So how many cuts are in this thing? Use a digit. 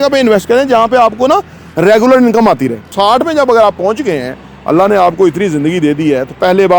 1